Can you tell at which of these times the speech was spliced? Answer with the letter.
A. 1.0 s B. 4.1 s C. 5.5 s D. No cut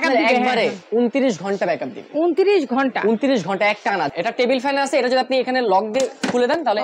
B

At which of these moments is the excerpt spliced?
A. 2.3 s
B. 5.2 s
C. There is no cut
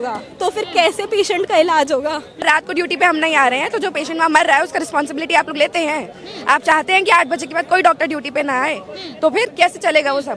A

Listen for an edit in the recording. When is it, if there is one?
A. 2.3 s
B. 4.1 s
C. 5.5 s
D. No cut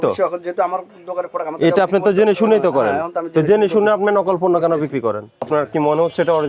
C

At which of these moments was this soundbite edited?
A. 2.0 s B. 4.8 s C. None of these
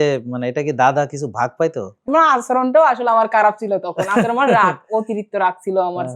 A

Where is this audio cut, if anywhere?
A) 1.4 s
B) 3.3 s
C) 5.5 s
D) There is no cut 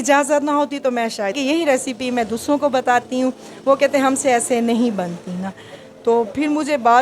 A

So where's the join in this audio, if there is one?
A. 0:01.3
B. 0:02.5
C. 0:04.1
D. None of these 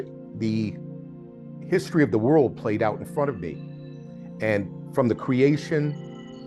D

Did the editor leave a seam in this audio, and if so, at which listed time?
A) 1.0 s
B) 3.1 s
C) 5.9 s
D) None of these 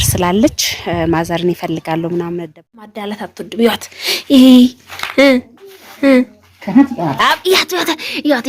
B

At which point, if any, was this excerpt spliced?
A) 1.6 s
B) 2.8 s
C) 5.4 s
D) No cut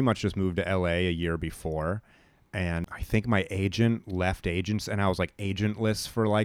B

